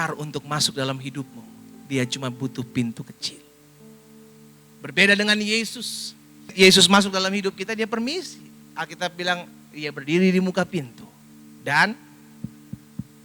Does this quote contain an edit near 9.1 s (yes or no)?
no